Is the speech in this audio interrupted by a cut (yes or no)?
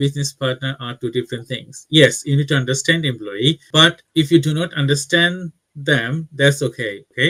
no